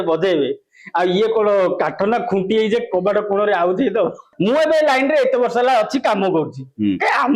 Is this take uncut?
no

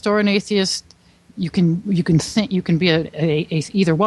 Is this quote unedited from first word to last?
yes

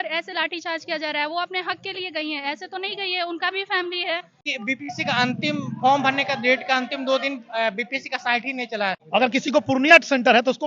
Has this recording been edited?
yes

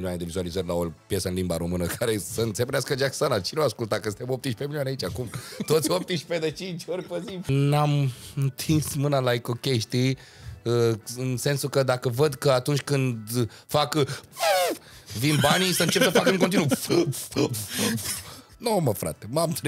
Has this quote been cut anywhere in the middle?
yes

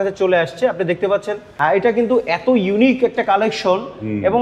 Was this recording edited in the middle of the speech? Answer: yes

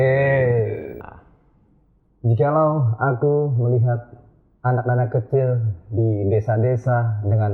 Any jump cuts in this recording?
yes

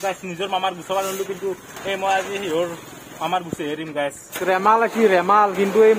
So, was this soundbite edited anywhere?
yes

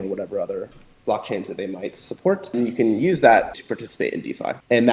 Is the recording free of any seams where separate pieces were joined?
no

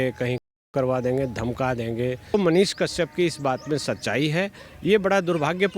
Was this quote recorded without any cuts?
no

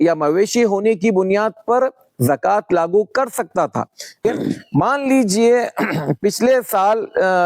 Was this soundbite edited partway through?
yes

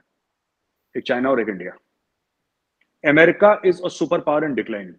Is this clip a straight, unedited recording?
yes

